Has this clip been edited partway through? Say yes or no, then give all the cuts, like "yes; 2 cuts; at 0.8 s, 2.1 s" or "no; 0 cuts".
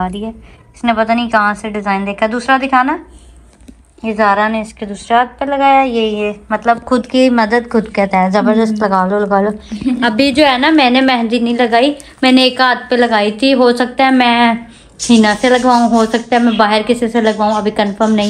no; 0 cuts